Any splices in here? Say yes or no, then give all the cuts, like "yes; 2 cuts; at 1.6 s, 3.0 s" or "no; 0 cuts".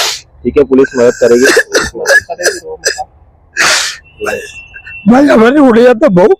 no; 0 cuts